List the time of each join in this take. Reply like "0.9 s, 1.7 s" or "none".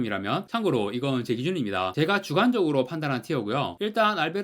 none